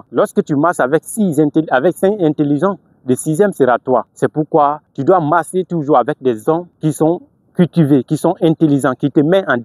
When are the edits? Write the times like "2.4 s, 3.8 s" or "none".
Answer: 4.5 s, 6.7 s